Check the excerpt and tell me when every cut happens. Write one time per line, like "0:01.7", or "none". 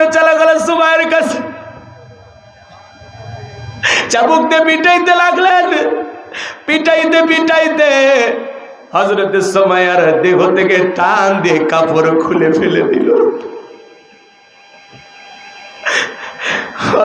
none